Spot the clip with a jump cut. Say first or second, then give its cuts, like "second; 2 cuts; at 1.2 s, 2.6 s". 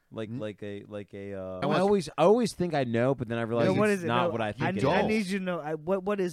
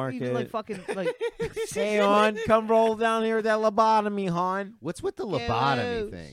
first; 1 cut; at 1.5 s